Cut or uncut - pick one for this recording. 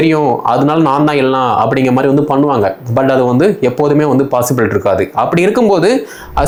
uncut